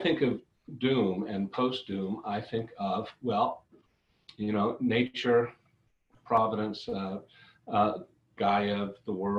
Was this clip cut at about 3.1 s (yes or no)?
no